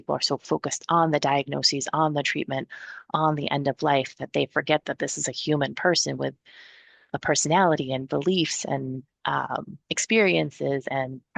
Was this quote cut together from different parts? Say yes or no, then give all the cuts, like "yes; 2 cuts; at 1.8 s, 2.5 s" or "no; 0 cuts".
no; 0 cuts